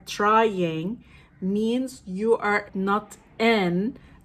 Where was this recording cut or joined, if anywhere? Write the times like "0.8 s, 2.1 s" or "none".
2.7 s